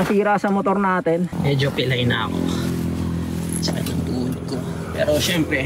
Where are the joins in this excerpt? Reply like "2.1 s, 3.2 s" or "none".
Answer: 1.4 s

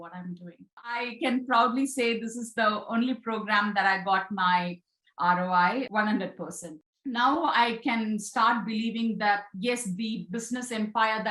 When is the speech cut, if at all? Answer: 1.1 s, 6.6 s

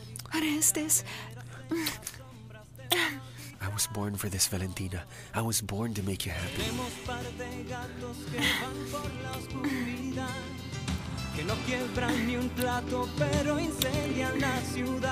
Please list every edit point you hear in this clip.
12.5 s

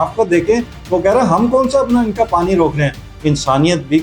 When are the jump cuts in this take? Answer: 3.1 s

